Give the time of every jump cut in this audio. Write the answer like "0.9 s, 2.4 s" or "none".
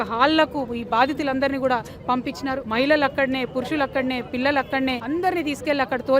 2.6 s, 5.0 s